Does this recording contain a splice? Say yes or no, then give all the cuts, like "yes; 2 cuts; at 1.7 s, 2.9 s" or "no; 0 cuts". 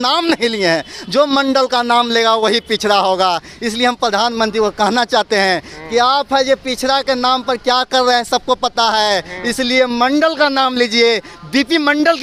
no; 0 cuts